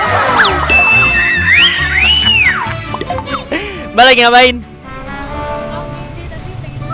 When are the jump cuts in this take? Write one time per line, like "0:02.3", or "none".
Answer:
none